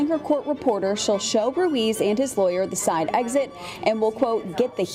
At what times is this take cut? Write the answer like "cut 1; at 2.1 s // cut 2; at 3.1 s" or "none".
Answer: none